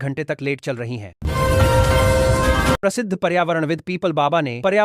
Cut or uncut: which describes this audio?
cut